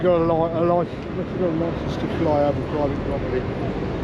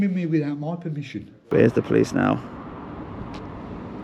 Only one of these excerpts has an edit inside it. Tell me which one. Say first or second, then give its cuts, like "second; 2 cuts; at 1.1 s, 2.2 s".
second; 1 cut; at 1.4 s